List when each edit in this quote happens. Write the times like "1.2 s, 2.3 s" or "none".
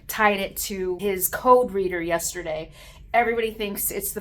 1.0 s